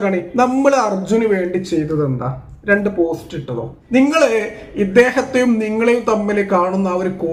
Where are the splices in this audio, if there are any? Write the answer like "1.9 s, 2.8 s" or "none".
3.7 s